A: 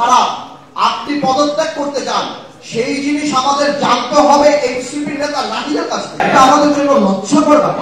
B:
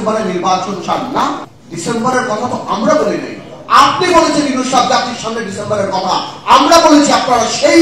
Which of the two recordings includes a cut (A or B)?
A